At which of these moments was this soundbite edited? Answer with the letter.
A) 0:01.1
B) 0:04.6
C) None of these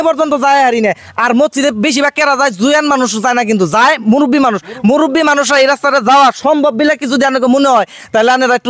C